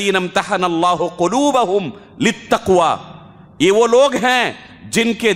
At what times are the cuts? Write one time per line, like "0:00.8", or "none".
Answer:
none